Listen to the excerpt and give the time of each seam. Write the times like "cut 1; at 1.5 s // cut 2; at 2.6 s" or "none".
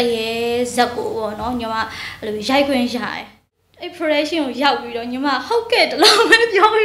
cut 1; at 3.4 s